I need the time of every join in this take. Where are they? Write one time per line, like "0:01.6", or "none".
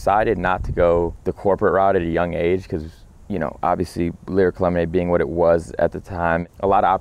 0:01.2